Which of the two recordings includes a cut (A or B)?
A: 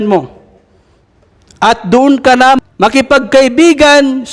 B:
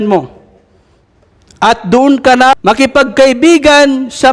B